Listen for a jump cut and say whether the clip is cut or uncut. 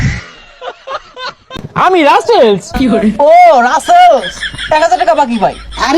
cut